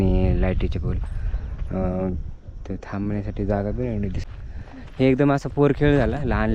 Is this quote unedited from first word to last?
no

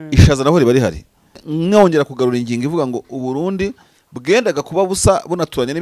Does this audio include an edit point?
yes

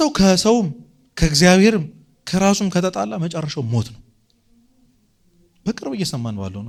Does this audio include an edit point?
no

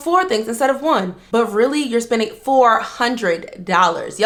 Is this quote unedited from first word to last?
yes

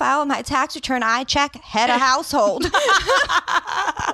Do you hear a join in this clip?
no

